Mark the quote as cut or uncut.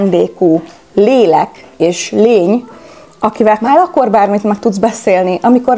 cut